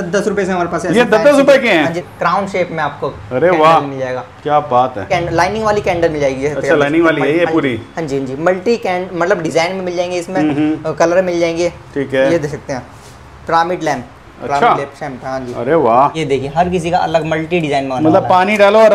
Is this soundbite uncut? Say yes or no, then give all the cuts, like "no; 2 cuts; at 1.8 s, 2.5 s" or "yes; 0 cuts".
no; 3 cuts; at 2.1 s, 5.0 s, 16.2 s